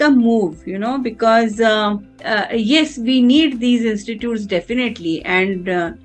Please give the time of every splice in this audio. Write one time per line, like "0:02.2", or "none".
none